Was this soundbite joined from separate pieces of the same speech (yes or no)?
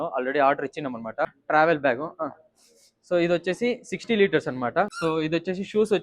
yes